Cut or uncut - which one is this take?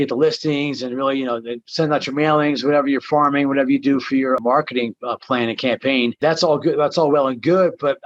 cut